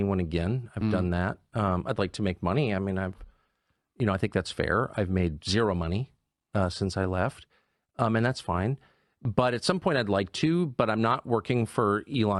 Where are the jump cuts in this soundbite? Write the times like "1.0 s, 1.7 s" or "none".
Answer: none